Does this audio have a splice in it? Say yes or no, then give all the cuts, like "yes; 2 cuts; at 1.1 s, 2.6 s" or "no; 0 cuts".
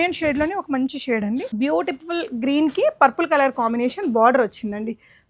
yes; 1 cut; at 1.5 s